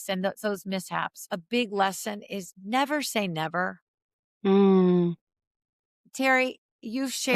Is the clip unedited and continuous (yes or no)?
no